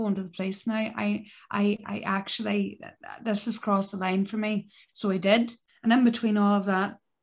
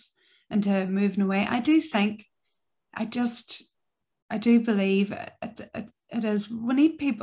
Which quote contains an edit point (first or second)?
first